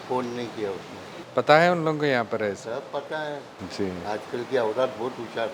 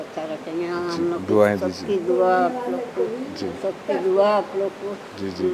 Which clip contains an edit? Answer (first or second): first